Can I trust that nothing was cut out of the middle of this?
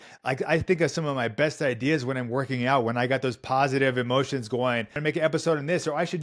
no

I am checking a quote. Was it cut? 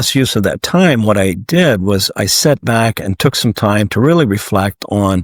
no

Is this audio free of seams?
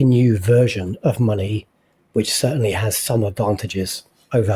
yes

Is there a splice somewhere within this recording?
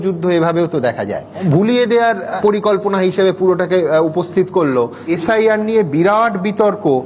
yes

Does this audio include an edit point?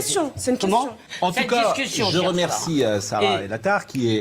yes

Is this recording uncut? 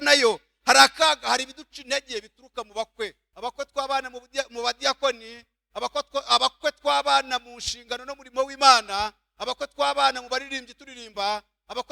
no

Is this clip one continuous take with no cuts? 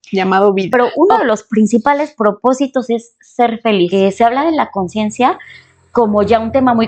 no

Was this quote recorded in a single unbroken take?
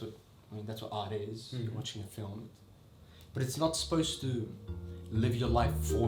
yes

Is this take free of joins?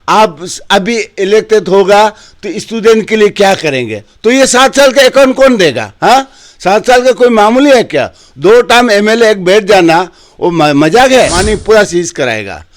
no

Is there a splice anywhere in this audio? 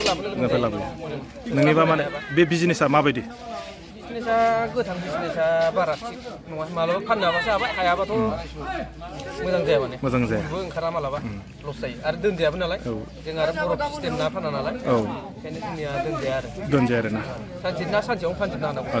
no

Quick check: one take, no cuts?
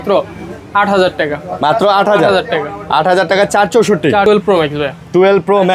no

